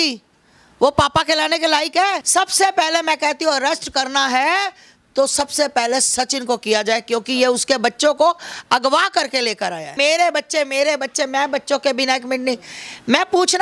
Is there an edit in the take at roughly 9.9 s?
yes; 2 cuts; at 2.2 s, 9.9 s

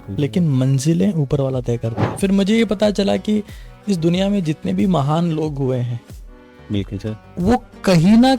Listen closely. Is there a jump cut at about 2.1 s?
yes; 1 cut; at 2.1 s

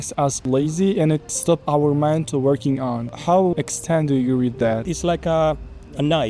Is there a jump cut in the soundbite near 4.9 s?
yes; 2 cuts; at 3.5 s, 4.9 s

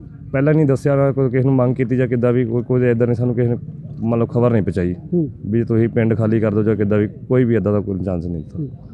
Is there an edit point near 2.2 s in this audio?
no; 0 cuts

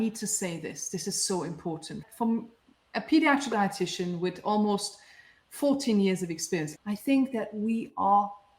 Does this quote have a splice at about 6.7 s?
yes; 1 cut; at 6.7 s

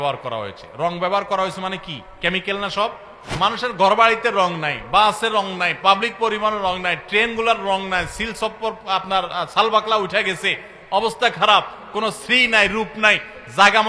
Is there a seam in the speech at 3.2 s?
yes; 1 cut; at 3.2 s

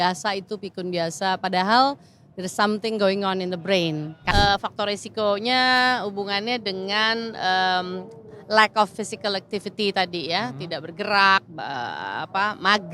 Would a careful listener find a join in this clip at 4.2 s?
yes; 1 cut; at 4.2 s

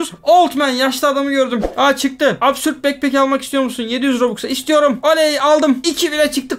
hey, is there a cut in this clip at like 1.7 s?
yes; 1 cut; at 1.7 s

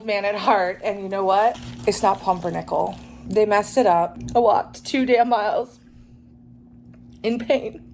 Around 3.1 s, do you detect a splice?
yes; 3 cuts; at 1.7 s, 3.1 s, 4.2 s

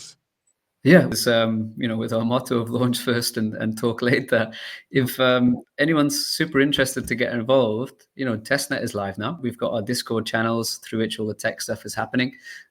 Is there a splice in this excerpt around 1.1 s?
yes; 2 cuts; at 1.1 s, 9.4 s

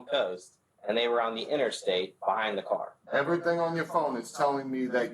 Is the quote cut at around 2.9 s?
yes; 1 cut; at 2.9 s

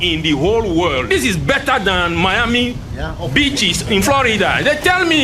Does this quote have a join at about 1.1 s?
yes; 1 cut; at 1.1 s

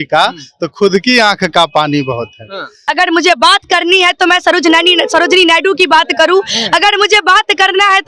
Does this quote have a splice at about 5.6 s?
no; 1 cut; at 2.8 s

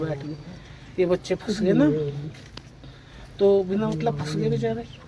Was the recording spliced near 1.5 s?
no; 0 cuts

